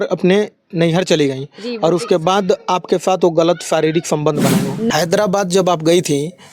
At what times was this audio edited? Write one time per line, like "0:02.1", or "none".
0:04.9